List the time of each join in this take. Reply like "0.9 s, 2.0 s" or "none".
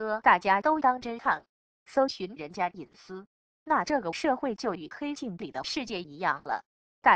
none

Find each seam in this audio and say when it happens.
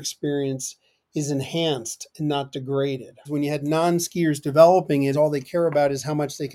3.3 s, 5.1 s

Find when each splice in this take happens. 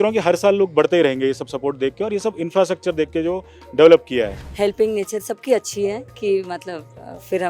4.4 s

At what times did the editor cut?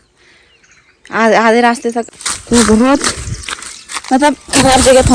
2.1 s

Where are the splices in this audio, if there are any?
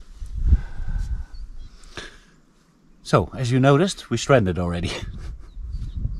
none

